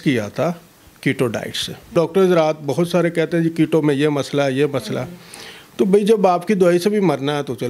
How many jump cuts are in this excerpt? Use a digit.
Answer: 1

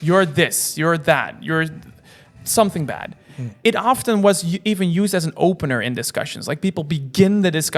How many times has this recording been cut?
1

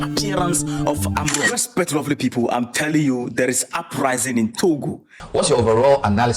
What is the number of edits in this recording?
1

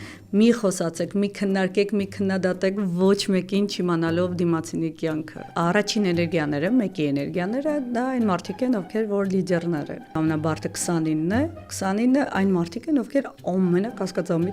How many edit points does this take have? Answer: 2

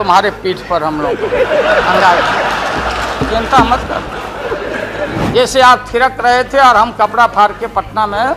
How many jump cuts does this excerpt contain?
1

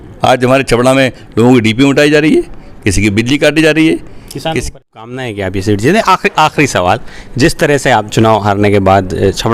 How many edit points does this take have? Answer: 1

